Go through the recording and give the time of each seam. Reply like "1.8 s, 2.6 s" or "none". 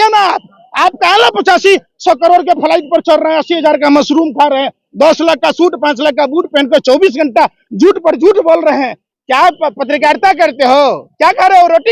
9.0 s